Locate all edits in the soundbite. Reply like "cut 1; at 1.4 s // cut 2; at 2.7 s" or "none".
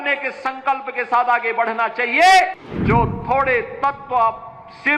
cut 1; at 2.7 s

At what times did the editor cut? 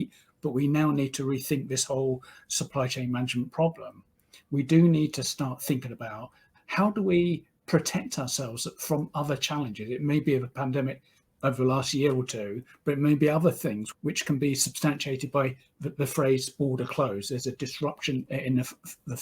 cut 1; at 13.9 s

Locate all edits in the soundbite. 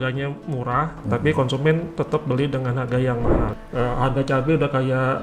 cut 1; at 3.5 s

